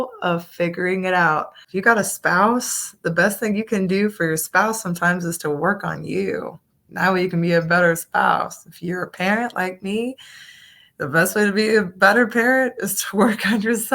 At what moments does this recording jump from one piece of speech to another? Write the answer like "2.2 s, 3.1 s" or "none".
1.6 s